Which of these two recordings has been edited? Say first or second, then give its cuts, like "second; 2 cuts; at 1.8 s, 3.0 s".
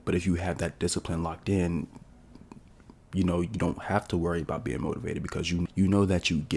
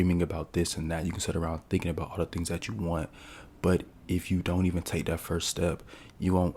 first; 1 cut; at 5.6 s